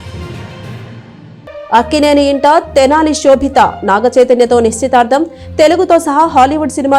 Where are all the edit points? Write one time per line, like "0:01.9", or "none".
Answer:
0:01.6

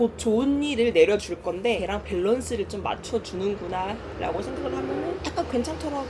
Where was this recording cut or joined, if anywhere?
0:05.2

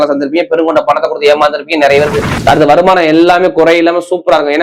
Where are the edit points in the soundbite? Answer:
0:02.3

